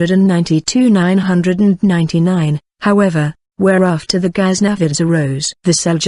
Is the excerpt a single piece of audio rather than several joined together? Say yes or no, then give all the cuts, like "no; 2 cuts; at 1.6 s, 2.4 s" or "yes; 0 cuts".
no; 1 cut; at 3.1 s